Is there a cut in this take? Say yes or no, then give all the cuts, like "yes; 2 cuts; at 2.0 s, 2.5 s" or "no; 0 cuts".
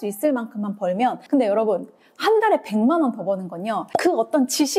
yes; 2 cuts; at 1.2 s, 3.8 s